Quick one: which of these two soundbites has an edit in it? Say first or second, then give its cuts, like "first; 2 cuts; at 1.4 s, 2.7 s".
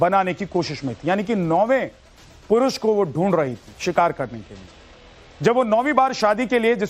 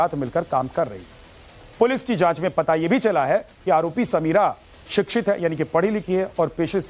first; 1 cut; at 5.5 s